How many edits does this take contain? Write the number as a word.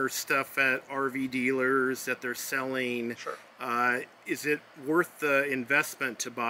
zero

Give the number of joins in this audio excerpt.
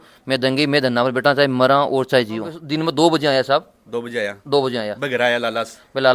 one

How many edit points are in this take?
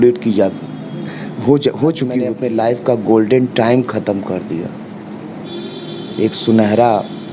one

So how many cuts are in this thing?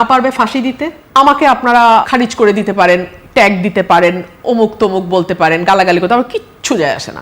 two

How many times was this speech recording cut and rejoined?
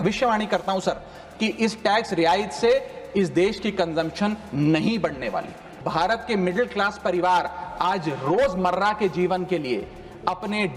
one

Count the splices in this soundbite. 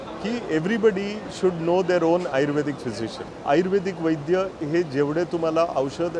one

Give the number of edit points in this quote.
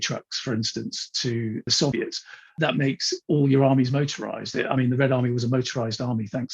one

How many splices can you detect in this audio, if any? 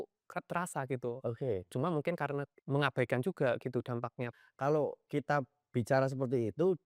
two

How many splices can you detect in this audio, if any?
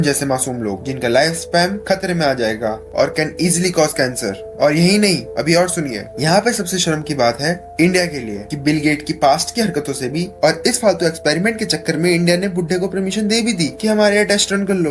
zero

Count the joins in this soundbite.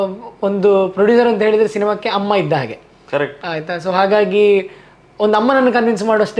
zero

